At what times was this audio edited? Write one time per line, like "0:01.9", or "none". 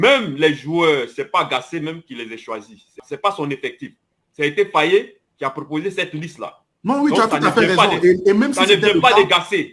0:03.0